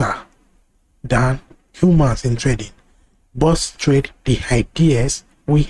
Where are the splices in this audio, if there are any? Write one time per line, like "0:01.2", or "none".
none